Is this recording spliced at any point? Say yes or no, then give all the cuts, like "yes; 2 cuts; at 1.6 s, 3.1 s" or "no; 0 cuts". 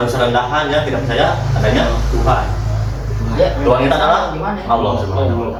no; 0 cuts